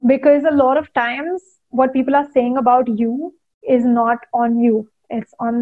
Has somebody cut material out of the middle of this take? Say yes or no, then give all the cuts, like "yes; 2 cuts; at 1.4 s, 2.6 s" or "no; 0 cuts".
no; 0 cuts